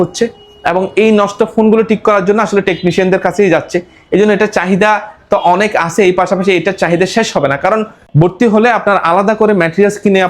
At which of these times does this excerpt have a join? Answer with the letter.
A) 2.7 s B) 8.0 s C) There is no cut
B